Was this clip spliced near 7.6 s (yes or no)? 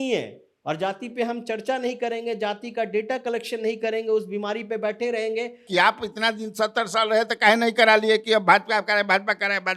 no